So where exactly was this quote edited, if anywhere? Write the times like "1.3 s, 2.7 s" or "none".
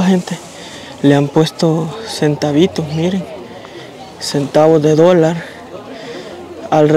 none